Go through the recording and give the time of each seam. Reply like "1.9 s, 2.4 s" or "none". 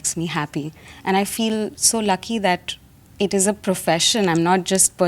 none